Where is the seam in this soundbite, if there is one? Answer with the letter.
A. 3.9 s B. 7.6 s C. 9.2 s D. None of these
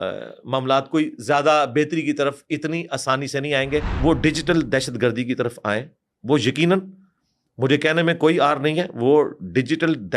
A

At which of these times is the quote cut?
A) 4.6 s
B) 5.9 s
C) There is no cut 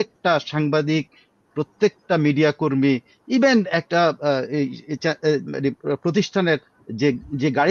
C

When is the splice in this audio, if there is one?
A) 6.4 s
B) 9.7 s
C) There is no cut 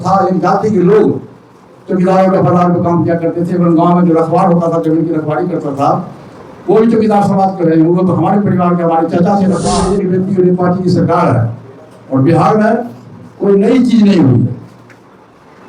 B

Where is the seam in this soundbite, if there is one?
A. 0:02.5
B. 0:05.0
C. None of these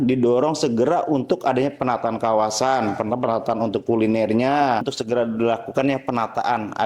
B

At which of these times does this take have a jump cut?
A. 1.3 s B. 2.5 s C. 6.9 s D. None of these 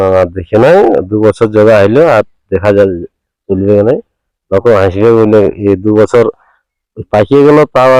D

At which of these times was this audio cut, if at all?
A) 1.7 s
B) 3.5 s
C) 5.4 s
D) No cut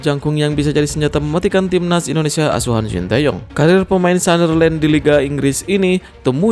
B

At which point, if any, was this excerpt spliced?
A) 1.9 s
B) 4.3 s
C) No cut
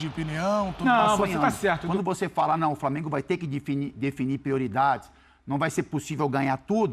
A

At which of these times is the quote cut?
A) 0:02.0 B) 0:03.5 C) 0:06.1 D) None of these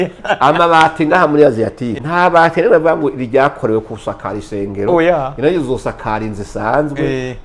A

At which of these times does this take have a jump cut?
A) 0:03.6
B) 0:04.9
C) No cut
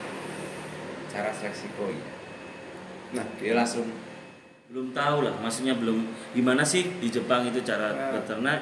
B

